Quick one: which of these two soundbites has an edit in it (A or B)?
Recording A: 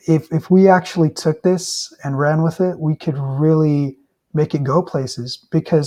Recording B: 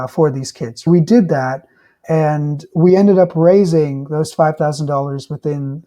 B